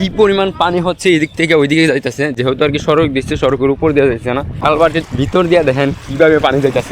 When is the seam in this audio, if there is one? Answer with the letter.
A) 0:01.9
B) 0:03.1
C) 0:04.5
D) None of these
C